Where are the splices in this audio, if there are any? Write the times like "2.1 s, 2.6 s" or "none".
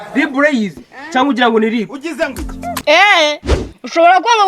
2.8 s